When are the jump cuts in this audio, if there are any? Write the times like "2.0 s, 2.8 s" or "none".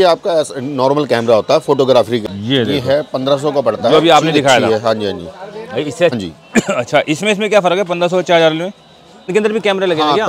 2.2 s, 6.1 s, 9.3 s